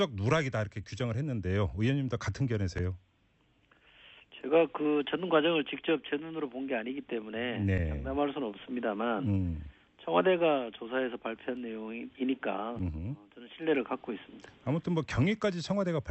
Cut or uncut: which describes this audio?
uncut